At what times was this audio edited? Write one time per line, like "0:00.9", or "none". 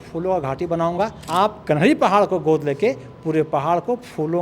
0:01.2

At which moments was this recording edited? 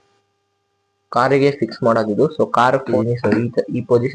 0:02.9

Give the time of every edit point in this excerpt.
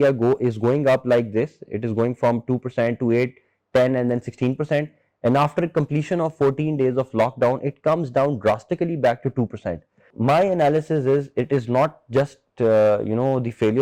0:10.1

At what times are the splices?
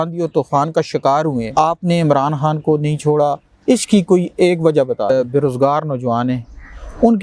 0:01.5
0:05.1

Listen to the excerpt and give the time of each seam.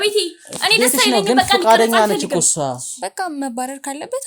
0:03.0

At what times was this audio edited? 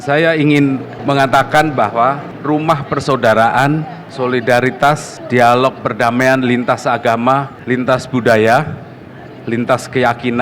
0:00.9
0:02.3
0:04.0
0:05.1
0:07.5

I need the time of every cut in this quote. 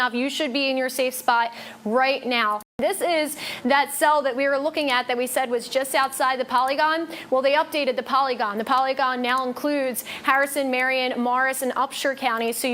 none

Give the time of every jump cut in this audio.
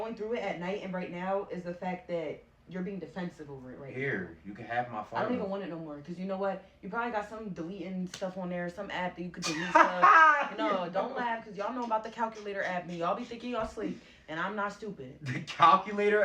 0:02.0
0:11.8

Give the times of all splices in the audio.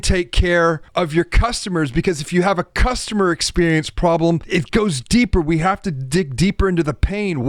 0:00.8
0:04.4

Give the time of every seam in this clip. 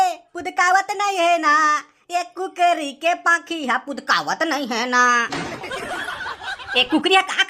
none

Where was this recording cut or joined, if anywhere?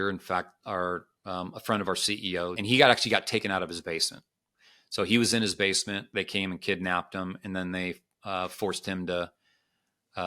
0:02.6

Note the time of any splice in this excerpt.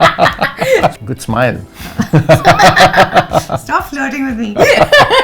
0:00.9

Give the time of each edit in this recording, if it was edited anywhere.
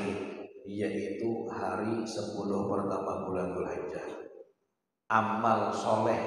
0:05.0

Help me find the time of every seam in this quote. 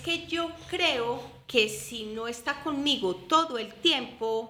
none

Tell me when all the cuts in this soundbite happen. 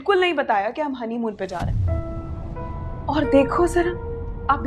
0:01.6
0:03.0

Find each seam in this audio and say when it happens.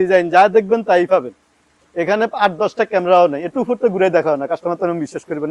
none

